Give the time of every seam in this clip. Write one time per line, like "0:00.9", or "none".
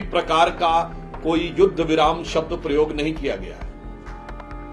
none